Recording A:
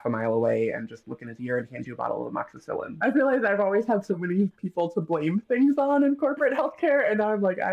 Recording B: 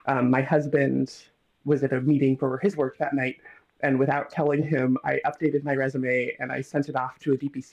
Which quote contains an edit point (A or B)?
A